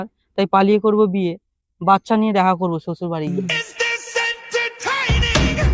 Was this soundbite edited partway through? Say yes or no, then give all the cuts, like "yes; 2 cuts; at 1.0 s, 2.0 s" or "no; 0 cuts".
no; 0 cuts